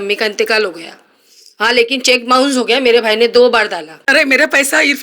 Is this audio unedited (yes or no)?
no